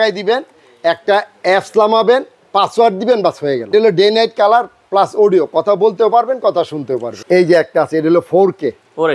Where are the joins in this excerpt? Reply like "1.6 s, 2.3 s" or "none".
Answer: 3.7 s, 7.2 s